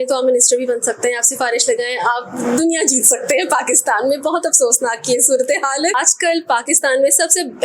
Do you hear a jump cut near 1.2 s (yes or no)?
no